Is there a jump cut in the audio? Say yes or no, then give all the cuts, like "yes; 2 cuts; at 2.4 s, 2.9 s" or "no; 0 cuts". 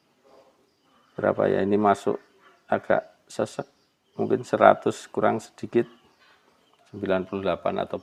no; 0 cuts